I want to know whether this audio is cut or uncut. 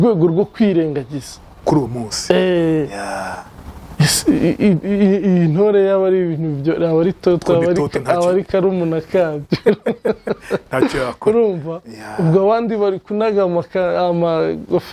uncut